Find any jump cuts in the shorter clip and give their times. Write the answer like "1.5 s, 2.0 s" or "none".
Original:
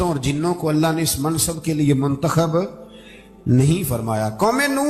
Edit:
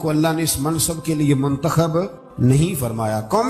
2.3 s